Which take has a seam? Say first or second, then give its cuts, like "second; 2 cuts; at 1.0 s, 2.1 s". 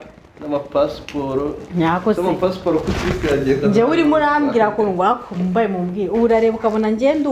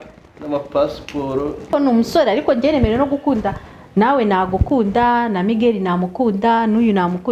second; 1 cut; at 1.7 s